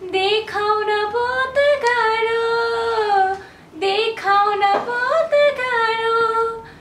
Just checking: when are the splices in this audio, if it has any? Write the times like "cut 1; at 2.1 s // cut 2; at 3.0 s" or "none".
none